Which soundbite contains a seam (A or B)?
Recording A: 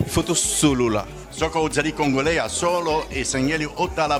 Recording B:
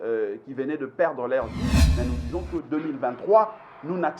B